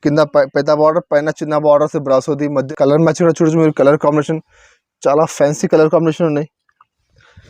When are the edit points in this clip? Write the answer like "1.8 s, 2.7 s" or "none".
2.6 s